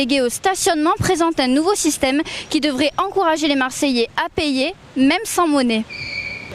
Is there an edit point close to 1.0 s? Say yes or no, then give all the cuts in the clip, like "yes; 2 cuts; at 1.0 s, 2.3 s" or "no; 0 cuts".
yes; 1 cut; at 1.0 s